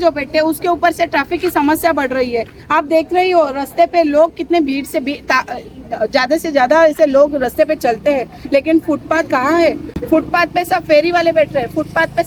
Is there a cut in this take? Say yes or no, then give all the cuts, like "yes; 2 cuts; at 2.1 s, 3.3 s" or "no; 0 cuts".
no; 0 cuts